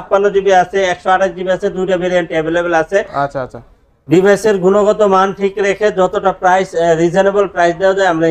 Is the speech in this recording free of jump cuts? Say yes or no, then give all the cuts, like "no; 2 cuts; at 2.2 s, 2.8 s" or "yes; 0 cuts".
yes; 0 cuts